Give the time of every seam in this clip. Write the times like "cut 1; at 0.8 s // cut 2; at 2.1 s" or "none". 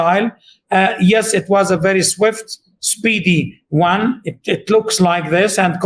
none